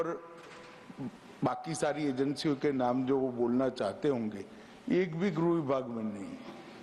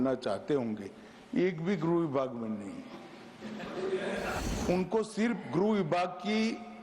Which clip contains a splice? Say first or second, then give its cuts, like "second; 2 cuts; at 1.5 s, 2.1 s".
second; 1 cut; at 4.4 s